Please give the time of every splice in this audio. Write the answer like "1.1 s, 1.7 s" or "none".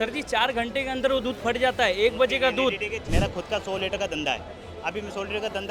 3.0 s